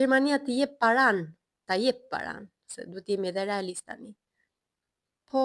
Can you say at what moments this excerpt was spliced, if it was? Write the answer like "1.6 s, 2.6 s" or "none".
none